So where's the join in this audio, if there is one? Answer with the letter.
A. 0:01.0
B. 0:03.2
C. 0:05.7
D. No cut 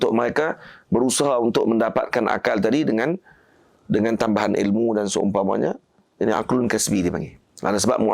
D